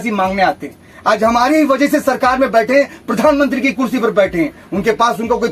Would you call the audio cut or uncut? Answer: uncut